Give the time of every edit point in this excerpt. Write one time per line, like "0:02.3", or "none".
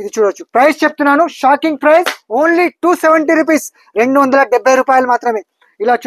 none